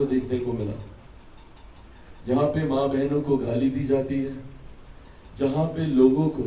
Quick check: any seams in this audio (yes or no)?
no